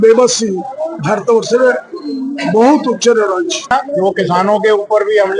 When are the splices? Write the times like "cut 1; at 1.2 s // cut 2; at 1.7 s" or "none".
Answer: cut 1; at 3.7 s